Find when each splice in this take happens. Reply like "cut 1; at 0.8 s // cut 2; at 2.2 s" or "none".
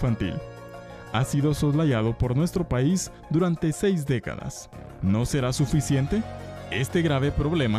cut 1; at 5.5 s